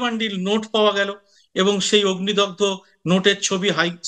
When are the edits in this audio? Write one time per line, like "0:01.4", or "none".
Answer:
none